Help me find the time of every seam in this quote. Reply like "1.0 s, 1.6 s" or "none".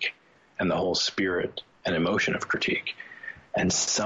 none